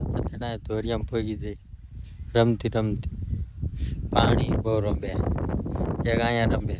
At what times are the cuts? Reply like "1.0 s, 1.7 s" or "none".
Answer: none